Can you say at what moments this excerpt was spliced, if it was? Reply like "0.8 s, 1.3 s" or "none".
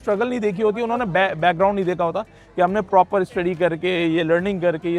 none